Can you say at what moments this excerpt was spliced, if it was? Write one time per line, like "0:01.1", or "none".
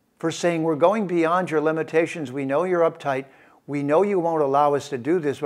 none